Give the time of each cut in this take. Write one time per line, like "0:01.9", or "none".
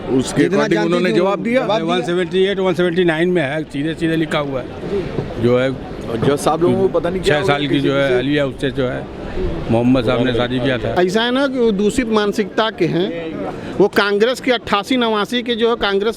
0:10.9